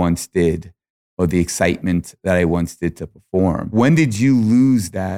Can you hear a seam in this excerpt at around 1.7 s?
no; 1 cut; at 3.7 s

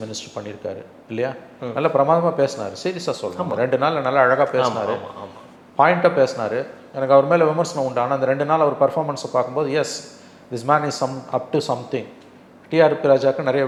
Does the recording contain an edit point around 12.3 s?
no; 0 cuts

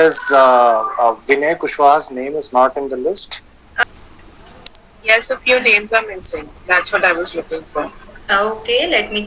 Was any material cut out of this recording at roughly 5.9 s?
no; 1 cut; at 3.8 s

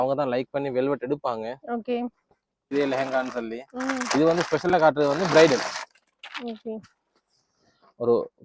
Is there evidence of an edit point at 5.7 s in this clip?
no; 1 cut; at 2.7 s

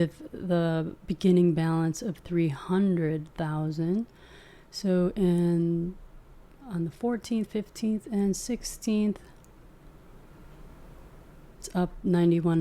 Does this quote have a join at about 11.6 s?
yes; 1 cut; at 11.6 s

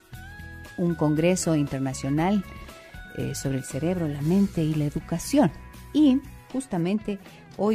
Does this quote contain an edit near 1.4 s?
no; 1 cut; at 4.0 s

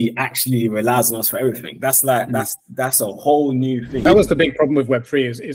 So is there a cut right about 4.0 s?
yes; 1 cut; at 4.0 s

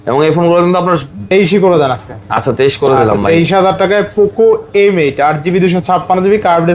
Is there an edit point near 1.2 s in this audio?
yes; 1 cut; at 1.2 s

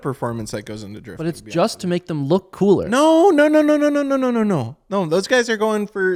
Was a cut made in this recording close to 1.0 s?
no; 0 cuts

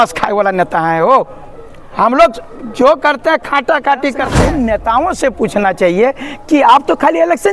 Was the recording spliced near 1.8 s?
no; 1 cut; at 4.4 s

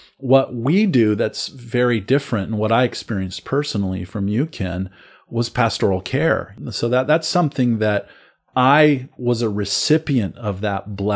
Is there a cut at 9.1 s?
no; 1 cut; at 6.5 s

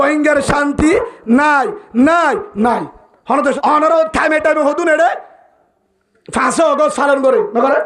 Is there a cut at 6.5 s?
no; 1 cut; at 3.6 s

